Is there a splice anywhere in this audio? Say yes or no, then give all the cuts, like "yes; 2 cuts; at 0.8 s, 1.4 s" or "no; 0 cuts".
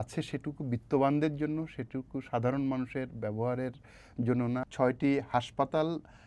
yes; 1 cut; at 4.6 s